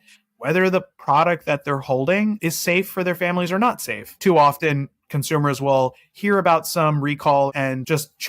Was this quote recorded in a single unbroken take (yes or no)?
no